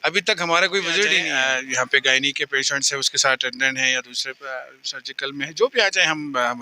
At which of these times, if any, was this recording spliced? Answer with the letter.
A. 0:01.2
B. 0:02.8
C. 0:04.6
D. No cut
A